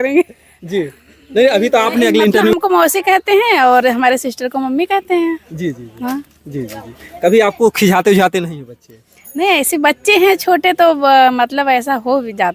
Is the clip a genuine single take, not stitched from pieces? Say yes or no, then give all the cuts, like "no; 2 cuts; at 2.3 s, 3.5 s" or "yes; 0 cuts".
no; 1 cut; at 2.5 s